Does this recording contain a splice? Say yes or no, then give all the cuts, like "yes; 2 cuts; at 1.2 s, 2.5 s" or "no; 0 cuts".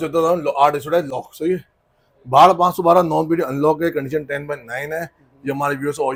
no; 0 cuts